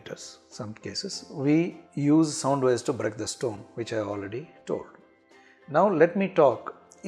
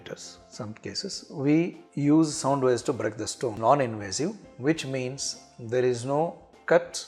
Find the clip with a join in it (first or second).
second